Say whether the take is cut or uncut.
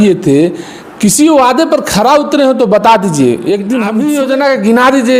cut